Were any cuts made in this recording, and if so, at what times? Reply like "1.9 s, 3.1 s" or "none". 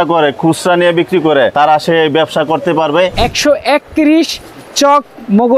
1.5 s, 3.1 s